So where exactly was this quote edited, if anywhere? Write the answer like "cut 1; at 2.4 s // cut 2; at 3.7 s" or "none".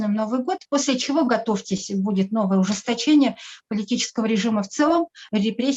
none